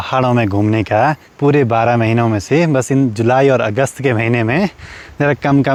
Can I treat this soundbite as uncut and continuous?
yes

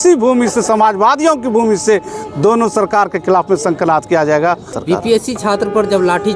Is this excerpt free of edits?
no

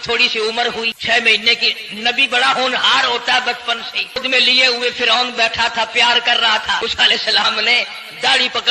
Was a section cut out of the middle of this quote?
yes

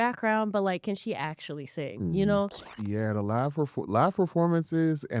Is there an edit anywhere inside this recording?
yes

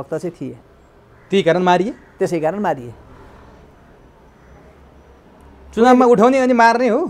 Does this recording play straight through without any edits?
yes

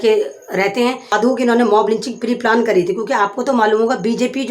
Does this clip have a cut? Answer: yes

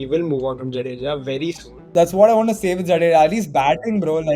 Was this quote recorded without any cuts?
no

